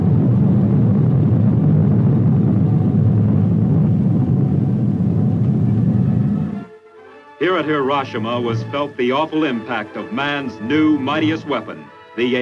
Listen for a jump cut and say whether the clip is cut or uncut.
cut